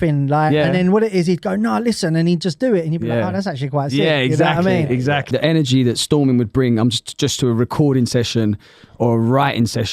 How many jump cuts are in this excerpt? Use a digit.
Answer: 1